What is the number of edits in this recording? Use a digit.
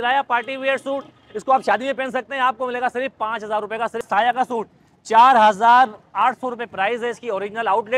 1